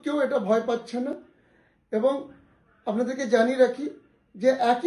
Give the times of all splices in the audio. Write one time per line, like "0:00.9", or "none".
none